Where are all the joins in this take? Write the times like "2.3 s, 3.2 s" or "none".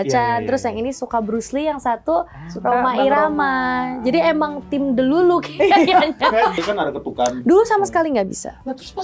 6.6 s